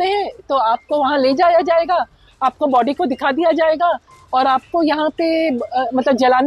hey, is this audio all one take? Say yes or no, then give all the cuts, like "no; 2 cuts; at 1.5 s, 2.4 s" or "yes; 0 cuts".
yes; 0 cuts